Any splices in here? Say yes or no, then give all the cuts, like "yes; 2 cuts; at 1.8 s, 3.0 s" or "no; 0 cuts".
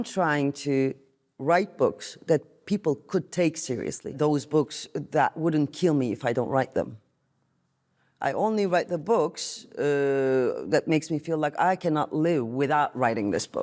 yes; 1 cut; at 4.2 s